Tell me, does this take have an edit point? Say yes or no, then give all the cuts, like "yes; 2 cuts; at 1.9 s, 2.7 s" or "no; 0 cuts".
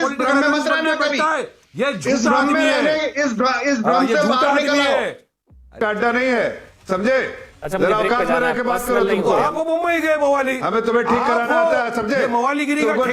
yes; 1 cut; at 5.7 s